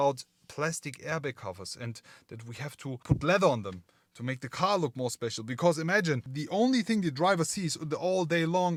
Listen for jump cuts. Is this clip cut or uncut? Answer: uncut